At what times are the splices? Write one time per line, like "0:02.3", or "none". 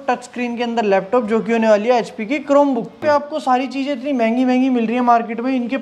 0:03.0